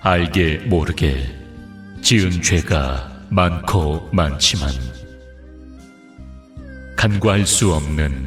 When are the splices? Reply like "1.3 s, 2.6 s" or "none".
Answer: none

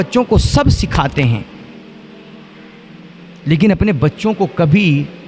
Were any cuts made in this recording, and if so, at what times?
none

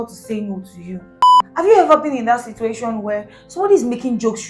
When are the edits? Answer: 1.4 s

